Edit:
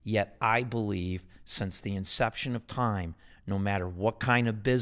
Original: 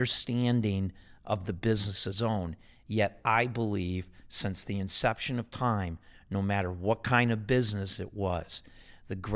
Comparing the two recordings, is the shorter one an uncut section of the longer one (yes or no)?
yes